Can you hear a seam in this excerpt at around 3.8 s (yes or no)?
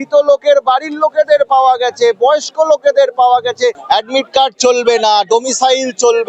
yes